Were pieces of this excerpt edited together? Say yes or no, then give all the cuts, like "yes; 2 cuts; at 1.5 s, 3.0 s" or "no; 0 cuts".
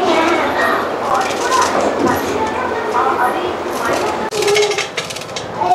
no; 0 cuts